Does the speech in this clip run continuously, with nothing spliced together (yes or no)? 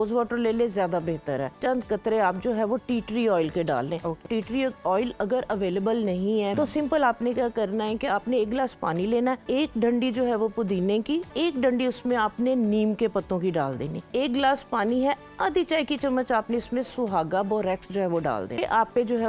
no